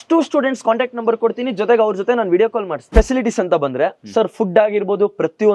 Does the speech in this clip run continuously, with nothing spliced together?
no; 1 cut; at 2.9 s

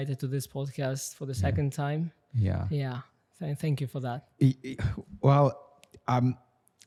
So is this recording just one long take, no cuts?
yes; 0 cuts

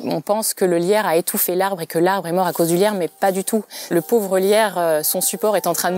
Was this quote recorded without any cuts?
yes; 0 cuts

